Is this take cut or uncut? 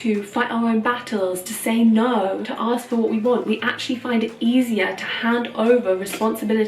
uncut